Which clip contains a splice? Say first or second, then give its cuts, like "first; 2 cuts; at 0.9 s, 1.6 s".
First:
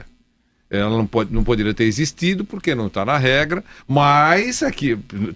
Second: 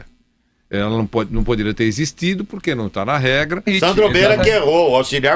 first; 1 cut; at 3.7 s